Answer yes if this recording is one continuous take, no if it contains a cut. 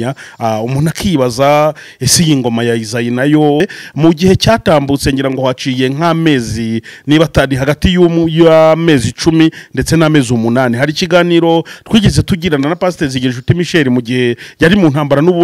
no